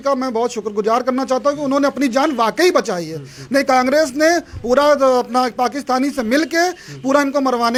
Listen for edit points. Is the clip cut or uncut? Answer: uncut